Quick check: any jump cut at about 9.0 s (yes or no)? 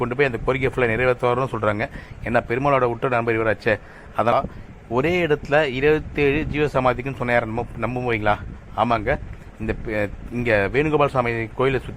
no